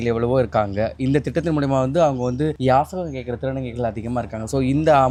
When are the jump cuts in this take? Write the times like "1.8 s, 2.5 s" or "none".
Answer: none